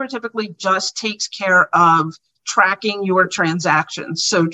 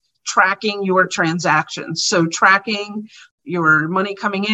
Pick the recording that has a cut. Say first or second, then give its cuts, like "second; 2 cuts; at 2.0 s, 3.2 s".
second; 1 cut; at 3.3 s